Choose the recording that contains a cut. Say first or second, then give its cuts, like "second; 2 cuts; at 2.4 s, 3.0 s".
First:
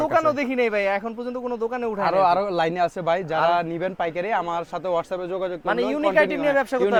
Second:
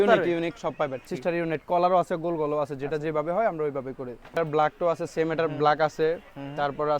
second; 2 cuts; at 1.1 s, 4.3 s